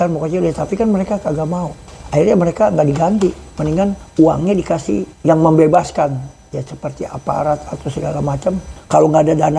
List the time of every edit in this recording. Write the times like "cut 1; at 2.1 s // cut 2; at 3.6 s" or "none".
cut 1; at 1.8 s // cut 2; at 4.0 s // cut 3; at 5.1 s // cut 4; at 8.7 s